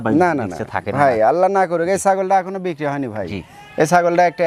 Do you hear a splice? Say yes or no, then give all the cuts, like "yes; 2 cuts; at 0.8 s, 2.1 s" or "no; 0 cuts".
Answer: no; 0 cuts